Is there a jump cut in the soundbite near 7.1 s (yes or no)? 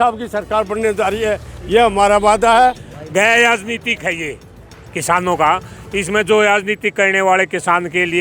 no